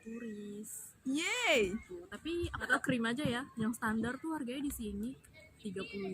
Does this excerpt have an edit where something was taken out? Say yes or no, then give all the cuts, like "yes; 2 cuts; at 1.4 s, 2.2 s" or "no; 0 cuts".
yes; 1 cut; at 2.7 s